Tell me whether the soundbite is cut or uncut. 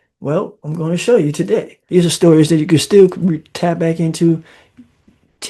cut